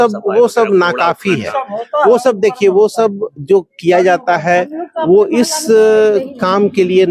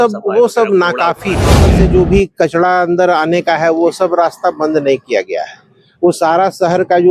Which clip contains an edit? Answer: second; 1 cut; at 1.7 s

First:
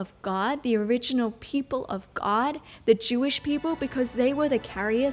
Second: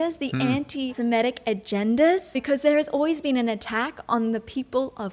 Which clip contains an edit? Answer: second; 2 cuts; at 0.9 s, 2.4 s

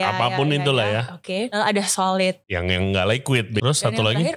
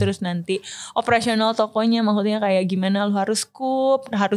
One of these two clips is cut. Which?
first; 3 cuts; at 1.5 s, 2.5 s, 3.6 s

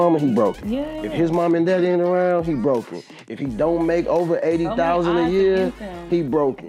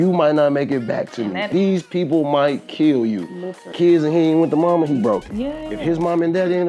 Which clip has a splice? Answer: second; 2 cuts; at 1.5 s, 3.7 s

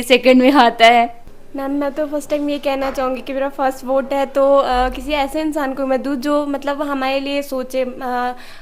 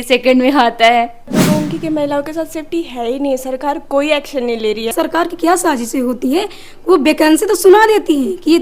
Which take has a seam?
second; 2 cuts; at 1.4 s, 4.9 s

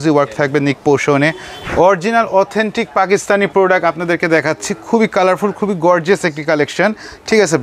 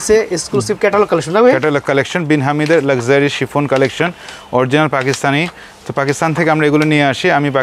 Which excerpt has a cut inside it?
first; 1 cut; at 1.5 s

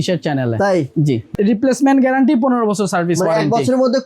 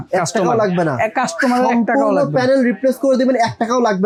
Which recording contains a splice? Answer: first; 1 cut; at 1.3 s

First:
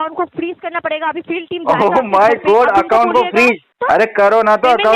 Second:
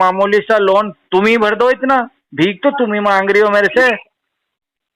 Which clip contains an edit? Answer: first; 1 cut; at 3.7 s

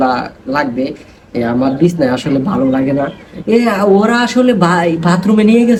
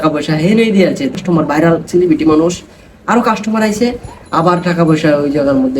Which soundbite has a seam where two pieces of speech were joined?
second; 1 cut; at 1.1 s

